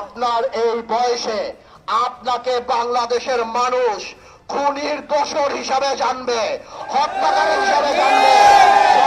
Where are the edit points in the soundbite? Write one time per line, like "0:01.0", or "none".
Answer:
none